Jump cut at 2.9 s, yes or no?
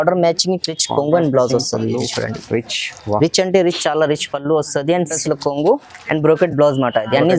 no